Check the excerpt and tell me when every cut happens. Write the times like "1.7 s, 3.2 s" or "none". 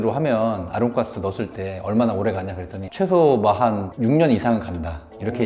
none